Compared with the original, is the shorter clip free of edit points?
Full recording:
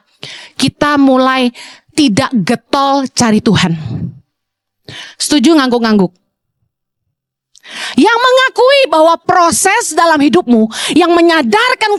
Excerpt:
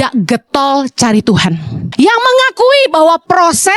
no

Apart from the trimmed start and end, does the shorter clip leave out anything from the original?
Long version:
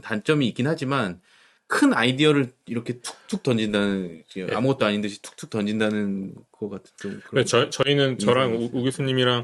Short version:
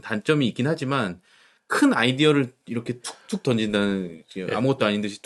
no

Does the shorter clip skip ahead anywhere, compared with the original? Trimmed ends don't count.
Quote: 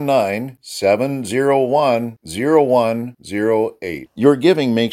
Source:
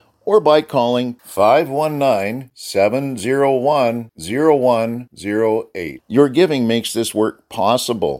no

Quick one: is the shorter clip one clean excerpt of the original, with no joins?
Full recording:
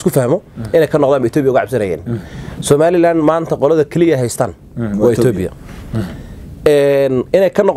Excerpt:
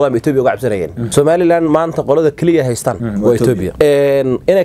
no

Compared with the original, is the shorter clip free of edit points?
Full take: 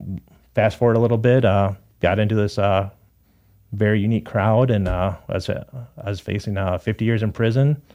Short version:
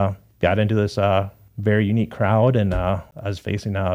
no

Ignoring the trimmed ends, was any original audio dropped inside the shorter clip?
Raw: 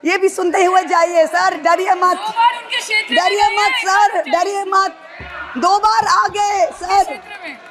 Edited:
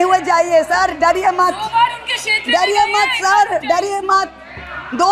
no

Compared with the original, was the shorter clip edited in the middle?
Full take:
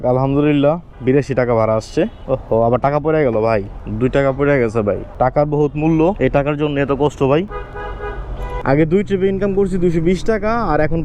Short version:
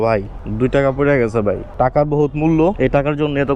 no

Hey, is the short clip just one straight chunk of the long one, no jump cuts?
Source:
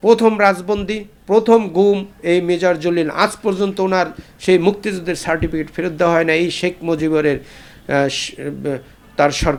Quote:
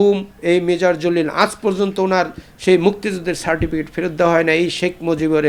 yes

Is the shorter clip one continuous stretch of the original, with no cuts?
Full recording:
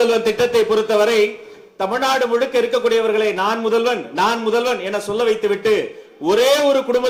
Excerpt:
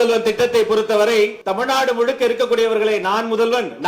no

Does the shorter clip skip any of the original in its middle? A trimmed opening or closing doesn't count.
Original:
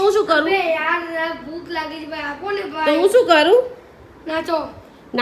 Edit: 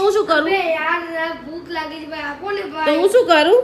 no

